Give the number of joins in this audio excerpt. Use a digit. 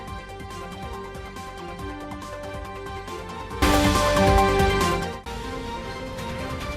1